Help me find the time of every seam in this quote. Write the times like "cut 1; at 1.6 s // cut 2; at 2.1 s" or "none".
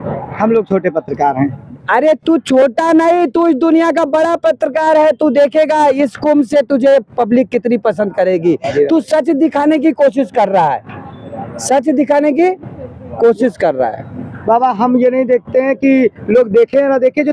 none